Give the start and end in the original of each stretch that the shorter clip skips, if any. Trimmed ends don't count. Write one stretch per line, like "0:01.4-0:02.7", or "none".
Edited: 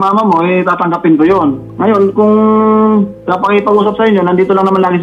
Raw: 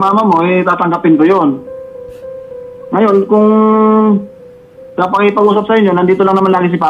0:01.7-0:02.8
0:04.3-0:04.9